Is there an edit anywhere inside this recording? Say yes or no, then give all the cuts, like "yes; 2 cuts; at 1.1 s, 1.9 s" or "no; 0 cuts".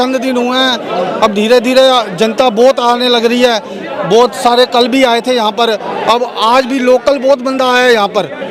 no; 0 cuts